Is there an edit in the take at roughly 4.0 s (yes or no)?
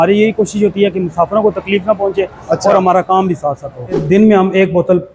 yes